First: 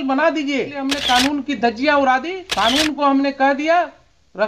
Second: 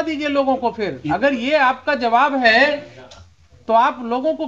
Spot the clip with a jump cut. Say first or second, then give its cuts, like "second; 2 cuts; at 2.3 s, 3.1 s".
first; 2 cuts; at 0.9 s, 2.4 s